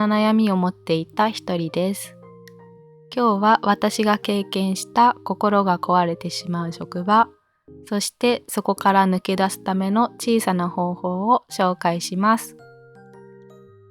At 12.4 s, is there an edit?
yes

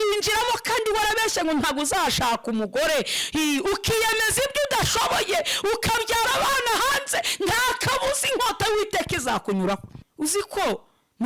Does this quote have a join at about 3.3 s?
no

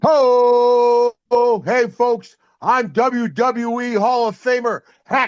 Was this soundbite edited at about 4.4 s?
no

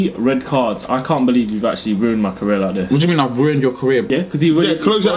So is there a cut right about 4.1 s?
yes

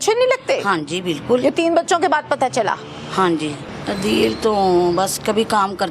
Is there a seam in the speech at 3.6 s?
yes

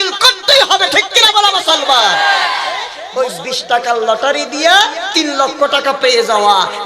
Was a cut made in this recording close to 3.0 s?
yes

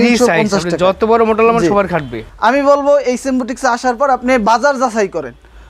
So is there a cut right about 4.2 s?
no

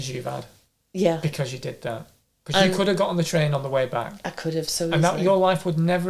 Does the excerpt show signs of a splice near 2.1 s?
no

